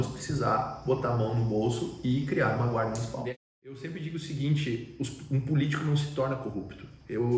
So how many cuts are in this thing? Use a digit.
1